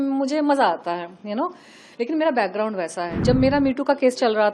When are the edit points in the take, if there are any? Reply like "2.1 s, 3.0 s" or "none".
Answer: 3.1 s